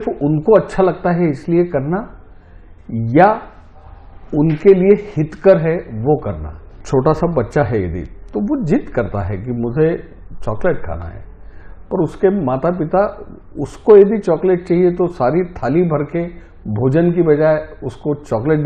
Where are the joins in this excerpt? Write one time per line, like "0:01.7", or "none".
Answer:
0:06.7

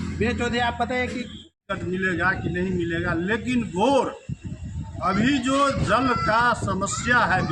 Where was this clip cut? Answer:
0:01.6

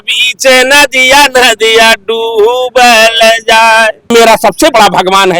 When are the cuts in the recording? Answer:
0:04.1

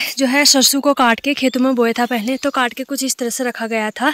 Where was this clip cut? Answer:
none

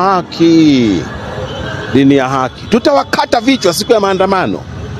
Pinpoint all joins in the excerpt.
none

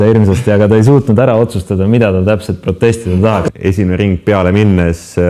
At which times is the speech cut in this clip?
0:03.5

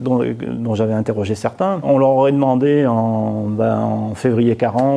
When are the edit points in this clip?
0:01.8

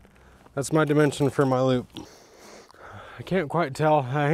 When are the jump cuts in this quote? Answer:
0:02.0

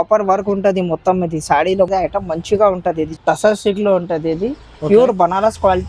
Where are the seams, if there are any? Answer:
0:01.9
0:03.2

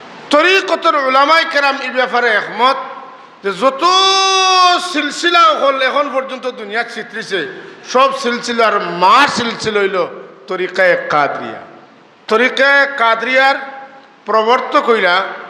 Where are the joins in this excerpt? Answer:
0:12.2

